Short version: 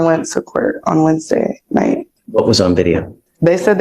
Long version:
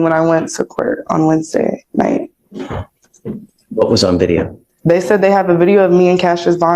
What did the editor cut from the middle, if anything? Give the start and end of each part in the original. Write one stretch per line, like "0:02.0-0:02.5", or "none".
0:02.4-0:03.6